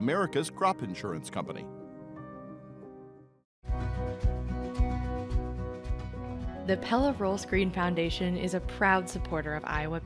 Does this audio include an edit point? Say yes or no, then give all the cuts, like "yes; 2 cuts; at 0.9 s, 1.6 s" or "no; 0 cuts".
no; 0 cuts